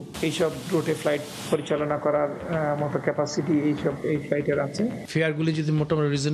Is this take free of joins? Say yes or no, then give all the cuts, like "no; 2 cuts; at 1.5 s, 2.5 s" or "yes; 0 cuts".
no; 1 cut; at 5.0 s